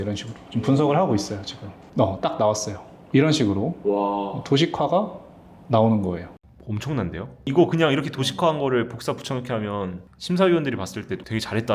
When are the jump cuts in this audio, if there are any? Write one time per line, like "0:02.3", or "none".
none